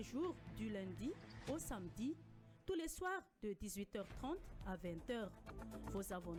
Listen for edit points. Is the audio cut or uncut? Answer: uncut